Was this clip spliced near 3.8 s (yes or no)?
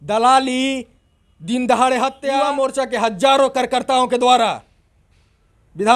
no